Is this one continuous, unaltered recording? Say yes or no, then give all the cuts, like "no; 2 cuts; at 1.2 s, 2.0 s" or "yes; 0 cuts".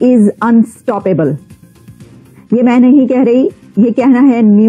yes; 0 cuts